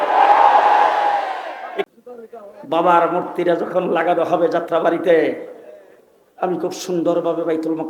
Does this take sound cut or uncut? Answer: cut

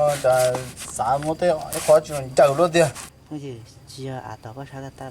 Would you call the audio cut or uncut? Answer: cut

